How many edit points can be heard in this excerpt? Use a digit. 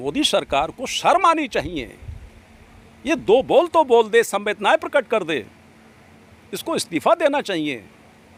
0